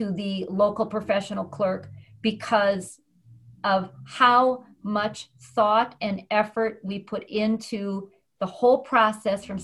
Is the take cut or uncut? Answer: uncut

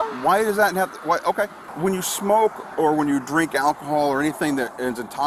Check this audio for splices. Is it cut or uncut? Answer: cut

